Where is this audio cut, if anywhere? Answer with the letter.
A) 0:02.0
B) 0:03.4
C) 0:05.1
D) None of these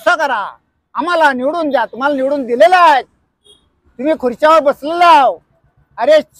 D